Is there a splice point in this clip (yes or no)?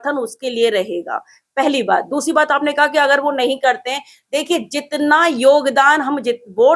no